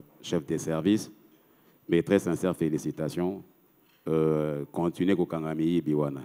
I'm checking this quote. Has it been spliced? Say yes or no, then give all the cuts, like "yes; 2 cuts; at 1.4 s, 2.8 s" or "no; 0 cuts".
no; 0 cuts